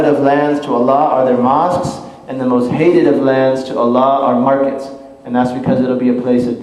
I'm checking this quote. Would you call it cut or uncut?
cut